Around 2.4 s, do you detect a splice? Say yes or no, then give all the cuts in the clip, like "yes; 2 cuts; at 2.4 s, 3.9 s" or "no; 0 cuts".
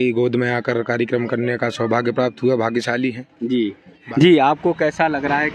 no; 1 cut; at 4.0 s